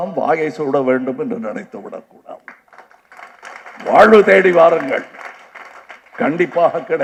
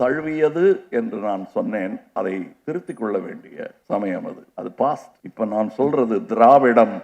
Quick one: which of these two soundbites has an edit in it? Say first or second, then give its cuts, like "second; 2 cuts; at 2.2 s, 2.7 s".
second; 4 cuts; at 2.5 s, 3.8 s, 4.4 s, 5.2 s